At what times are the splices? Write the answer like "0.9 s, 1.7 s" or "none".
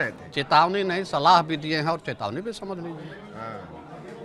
none